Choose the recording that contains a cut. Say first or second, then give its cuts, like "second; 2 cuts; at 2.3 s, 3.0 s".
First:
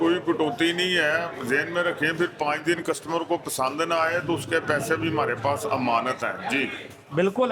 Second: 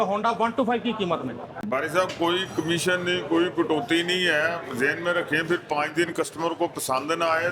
second; 1 cut; at 1.5 s